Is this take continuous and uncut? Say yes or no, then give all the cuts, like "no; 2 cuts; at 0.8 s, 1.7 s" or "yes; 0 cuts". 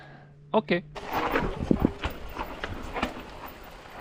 no; 1 cut; at 1.0 s